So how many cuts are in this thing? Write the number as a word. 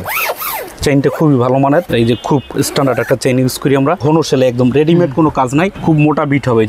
three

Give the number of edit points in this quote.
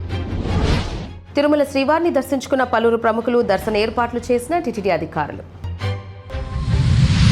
one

